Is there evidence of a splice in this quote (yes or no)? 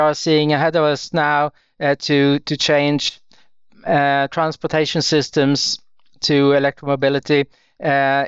no